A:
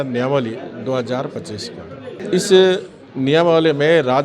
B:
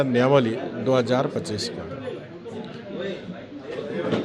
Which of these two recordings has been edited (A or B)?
A